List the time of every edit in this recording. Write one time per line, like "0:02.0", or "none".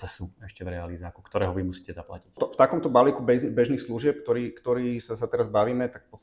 none